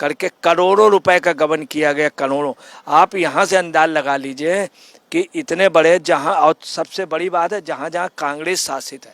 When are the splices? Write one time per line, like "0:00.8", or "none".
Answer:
none